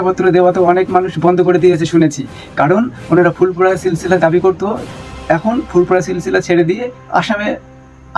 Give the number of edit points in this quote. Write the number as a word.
zero